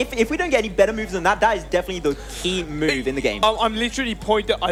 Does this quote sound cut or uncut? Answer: uncut